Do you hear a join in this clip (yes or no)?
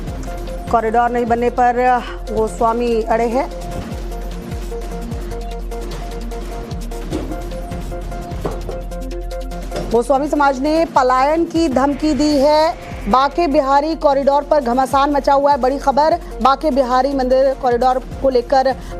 yes